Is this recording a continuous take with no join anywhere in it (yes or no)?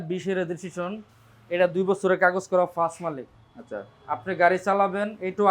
yes